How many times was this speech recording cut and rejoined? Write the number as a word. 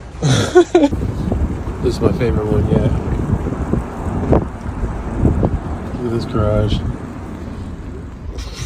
one